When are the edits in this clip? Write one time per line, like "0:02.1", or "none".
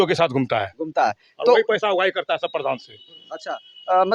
none